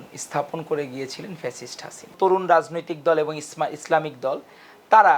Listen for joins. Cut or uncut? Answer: cut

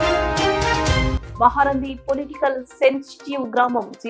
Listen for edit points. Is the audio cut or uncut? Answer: uncut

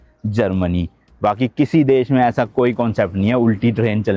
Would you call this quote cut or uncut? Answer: uncut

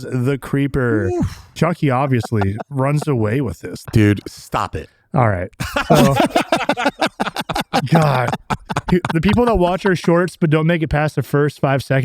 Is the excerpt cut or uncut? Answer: cut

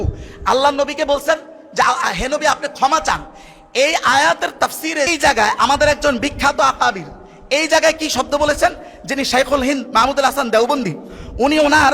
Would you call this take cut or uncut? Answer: cut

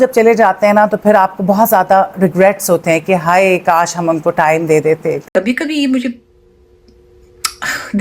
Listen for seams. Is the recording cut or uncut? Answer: cut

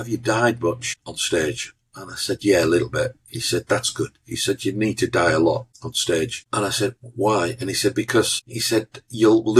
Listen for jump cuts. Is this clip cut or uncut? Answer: uncut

